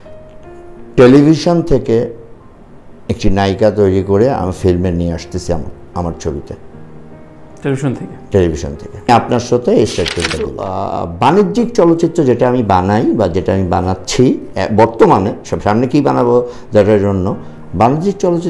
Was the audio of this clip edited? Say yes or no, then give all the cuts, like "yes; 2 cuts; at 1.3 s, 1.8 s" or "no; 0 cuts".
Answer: yes; 2 cuts; at 9.1 s, 10.6 s